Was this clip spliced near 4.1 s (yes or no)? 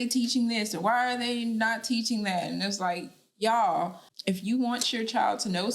yes